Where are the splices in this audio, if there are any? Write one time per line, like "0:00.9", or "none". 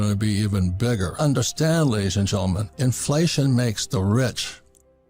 0:01.2

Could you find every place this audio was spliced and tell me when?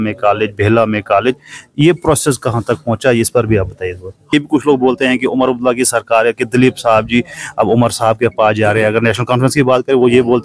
0:04.3

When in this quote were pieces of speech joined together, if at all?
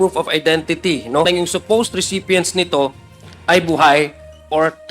0:01.3

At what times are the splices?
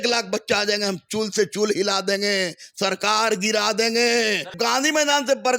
0:04.5

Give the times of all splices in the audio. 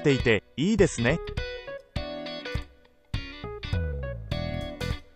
0:01.2

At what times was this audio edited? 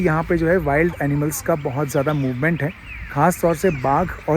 none

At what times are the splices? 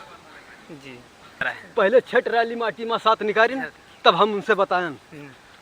0:01.6

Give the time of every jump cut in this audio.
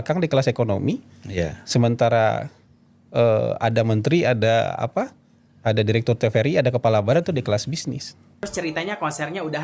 0:08.5

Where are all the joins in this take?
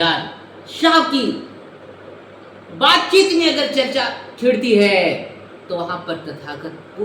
none

